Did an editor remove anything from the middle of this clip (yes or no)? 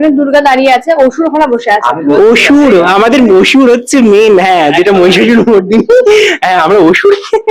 no